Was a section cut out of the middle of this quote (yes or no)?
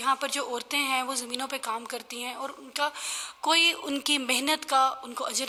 no